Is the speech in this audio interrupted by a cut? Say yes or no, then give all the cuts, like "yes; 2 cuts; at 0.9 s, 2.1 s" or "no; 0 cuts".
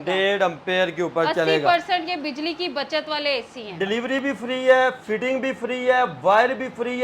yes; 1 cut; at 3.7 s